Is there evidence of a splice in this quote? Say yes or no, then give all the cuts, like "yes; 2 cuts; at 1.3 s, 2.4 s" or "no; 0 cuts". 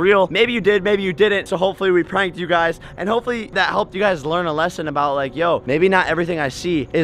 no; 0 cuts